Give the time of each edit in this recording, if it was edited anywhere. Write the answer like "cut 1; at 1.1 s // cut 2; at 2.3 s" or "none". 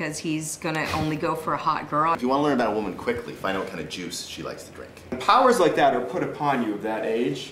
cut 1; at 2.2 s // cut 2; at 5.1 s